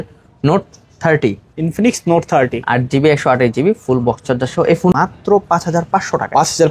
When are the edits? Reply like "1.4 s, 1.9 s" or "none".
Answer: 4.9 s